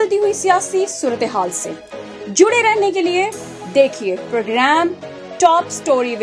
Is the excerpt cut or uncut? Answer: uncut